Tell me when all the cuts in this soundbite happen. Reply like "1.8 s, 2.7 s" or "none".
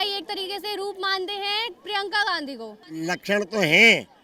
2.8 s